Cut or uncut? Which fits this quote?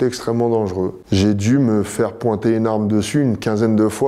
cut